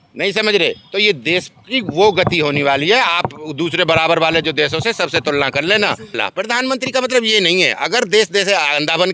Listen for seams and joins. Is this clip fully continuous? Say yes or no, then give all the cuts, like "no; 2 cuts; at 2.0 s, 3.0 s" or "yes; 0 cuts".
no; 1 cut; at 6.2 s